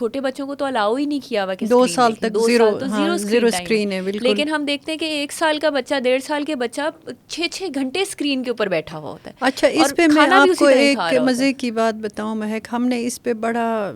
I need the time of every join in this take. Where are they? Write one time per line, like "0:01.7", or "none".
none